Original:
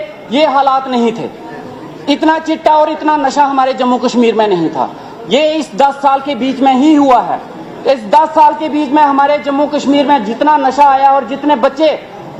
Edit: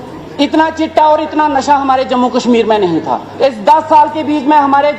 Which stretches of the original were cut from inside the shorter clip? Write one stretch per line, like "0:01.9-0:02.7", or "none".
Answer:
0:04.9-0:07.7